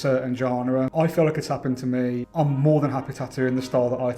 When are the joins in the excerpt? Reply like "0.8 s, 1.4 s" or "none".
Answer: 0.9 s, 2.3 s